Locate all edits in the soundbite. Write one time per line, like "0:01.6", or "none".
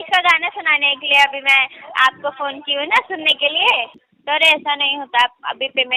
0:04.0

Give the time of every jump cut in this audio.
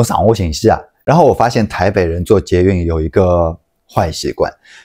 0:00.9

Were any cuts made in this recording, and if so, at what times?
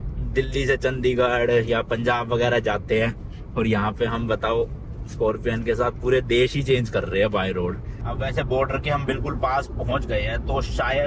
0:08.1

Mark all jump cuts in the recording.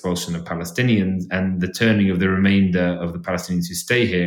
none

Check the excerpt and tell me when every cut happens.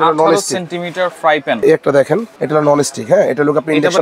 0:01.6

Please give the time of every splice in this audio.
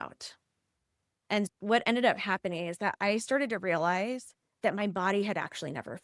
none

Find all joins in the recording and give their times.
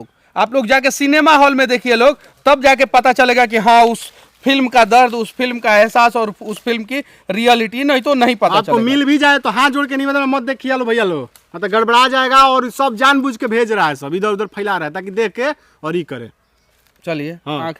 none

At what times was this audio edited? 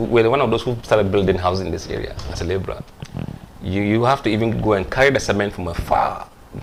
none

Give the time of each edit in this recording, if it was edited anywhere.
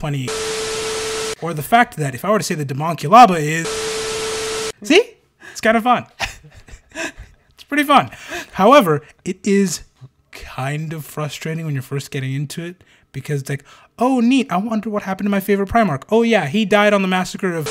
none

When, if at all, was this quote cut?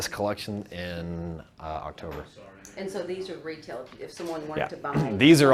none

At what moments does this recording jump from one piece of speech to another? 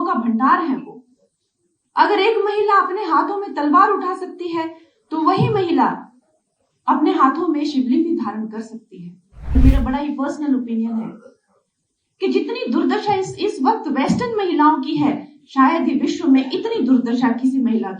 0:09.5

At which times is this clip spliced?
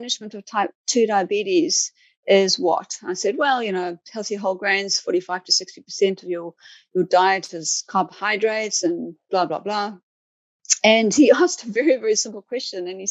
none

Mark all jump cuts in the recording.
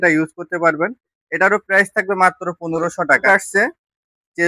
0:03.2

